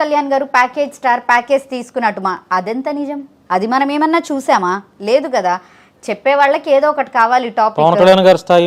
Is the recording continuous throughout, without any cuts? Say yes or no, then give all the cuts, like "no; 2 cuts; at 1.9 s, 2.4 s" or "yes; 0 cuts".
yes; 0 cuts